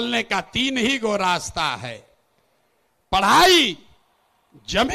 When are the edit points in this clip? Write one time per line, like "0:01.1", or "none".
none

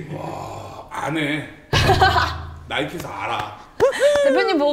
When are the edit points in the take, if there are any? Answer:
none

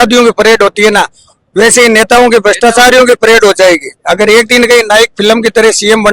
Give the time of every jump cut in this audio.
none

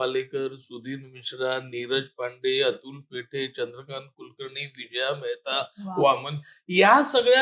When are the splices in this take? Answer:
none

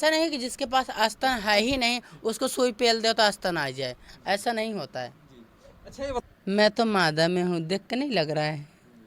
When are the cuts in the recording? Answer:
0:06.2

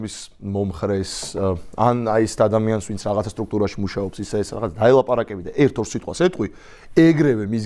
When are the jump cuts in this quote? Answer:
none

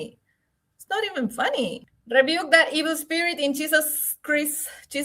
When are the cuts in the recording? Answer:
0:01.9

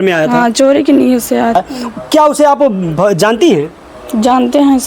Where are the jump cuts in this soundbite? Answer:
0:01.5

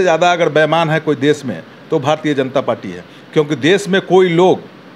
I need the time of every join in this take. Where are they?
none

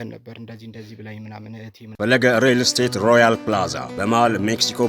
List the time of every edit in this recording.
0:01.9

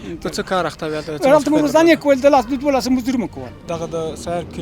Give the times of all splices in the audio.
0:03.6

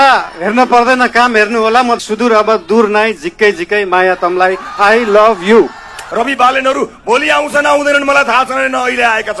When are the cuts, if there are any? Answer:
0:02.0
0:06.0

